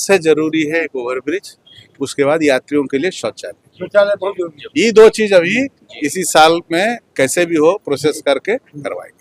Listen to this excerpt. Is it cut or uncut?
uncut